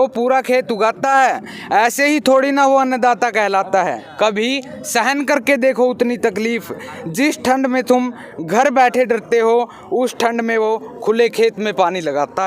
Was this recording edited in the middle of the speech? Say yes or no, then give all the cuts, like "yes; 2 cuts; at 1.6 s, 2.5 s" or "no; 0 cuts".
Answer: yes; 1 cut; at 4.0 s